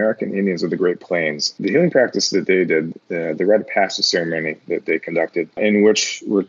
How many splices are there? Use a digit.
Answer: 2